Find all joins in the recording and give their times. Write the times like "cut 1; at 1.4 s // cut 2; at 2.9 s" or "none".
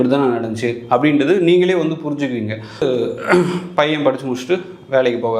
cut 1; at 2.8 s